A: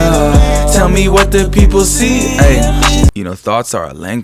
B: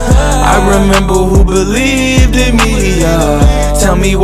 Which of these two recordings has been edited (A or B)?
A